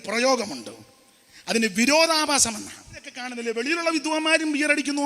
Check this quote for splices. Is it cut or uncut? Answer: cut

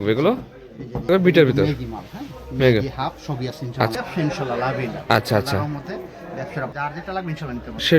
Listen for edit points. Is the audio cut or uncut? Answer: cut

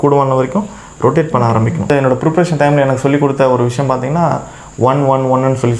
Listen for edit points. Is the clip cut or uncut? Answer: cut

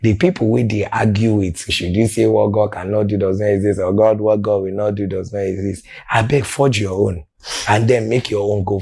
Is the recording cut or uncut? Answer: cut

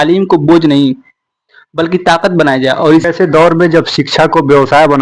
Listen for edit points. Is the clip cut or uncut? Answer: cut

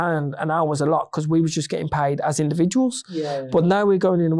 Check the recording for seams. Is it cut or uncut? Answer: uncut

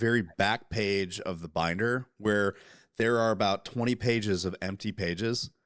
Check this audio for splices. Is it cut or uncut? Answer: uncut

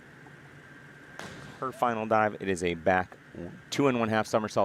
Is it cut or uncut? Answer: cut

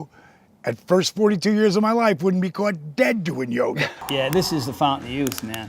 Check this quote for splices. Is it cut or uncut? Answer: cut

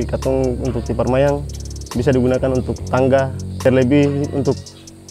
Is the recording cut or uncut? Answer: cut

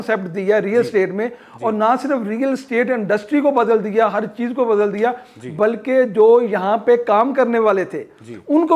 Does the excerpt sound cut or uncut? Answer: uncut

